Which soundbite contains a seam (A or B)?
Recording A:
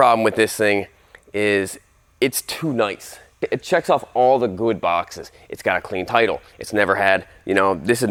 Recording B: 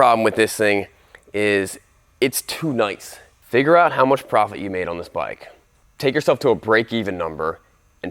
B